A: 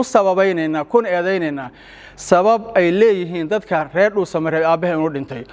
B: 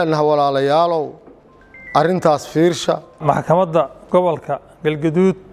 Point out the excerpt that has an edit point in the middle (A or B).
B